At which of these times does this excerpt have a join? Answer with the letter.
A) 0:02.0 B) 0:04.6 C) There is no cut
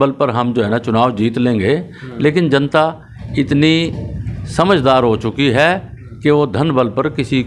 C